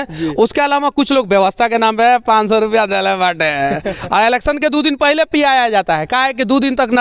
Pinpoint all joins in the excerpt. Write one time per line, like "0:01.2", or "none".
none

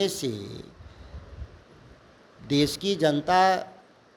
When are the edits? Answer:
none

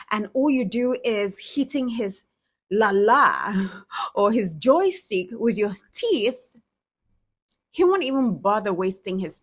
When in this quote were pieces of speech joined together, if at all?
none

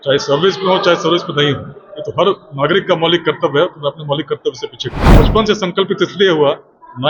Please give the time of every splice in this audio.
0:05.0

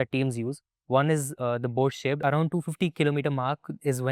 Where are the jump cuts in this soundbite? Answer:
0:02.2

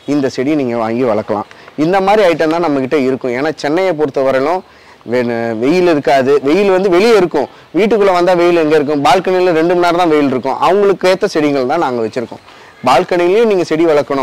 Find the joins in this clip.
none

